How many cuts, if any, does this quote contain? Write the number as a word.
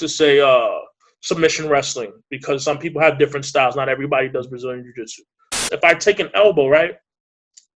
one